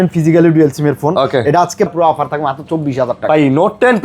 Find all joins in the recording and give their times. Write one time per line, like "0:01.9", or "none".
0:01.9

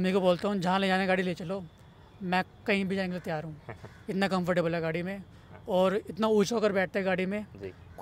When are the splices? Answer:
none

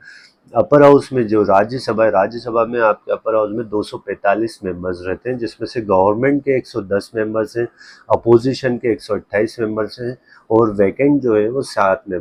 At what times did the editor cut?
none

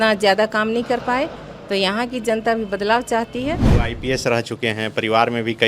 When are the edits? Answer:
0:03.7

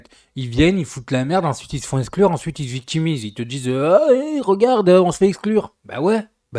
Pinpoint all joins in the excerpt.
none

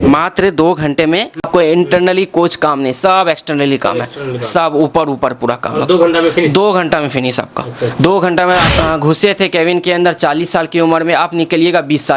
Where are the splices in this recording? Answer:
0:01.5
0:08.7

